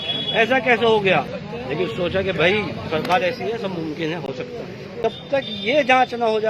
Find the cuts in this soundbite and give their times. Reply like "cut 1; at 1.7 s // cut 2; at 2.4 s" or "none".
cut 1; at 5.0 s